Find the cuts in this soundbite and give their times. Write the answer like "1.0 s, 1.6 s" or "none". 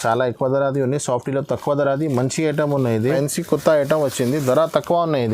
3.0 s